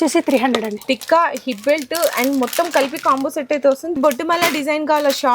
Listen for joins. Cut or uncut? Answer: cut